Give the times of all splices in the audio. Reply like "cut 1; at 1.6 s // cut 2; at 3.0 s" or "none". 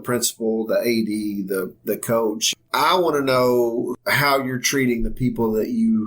cut 1; at 2.5 s // cut 2; at 4.0 s

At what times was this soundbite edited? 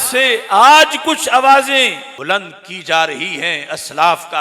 cut 1; at 2.1 s

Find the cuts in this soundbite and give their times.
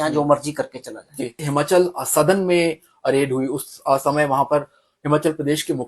cut 1; at 1.4 s

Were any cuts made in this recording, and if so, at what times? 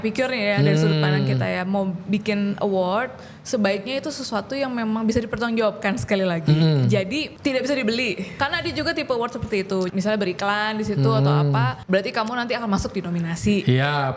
cut 1; at 7.3 s // cut 2; at 8.4 s // cut 3; at 9.9 s // cut 4; at 11.8 s

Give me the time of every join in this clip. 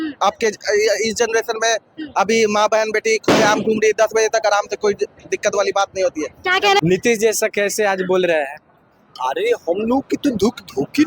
cut 1; at 6.8 s

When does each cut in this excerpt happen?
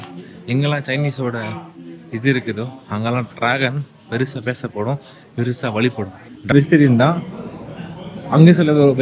cut 1; at 6.5 s

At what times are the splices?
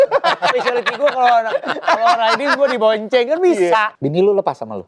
cut 1; at 3.9 s

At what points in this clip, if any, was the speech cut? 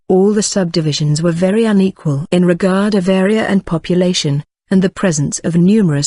cut 1; at 4.8 s

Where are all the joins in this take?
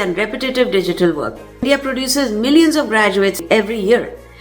cut 1; at 1.5 s // cut 2; at 3.4 s

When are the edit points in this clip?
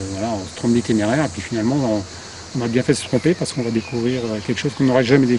none

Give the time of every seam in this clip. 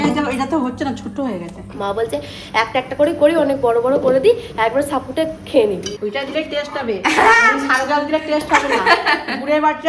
cut 1; at 1.8 s // cut 2; at 6.0 s

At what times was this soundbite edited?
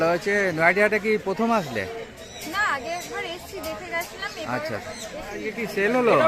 cut 1; at 5.4 s

